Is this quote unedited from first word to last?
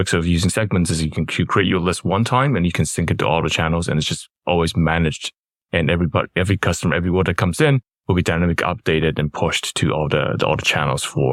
yes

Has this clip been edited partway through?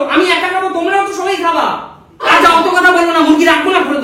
yes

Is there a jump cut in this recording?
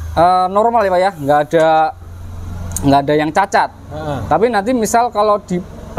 no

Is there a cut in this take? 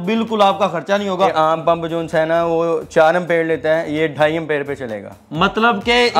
yes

